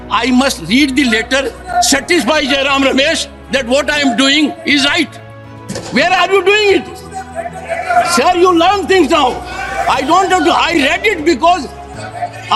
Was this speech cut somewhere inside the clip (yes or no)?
no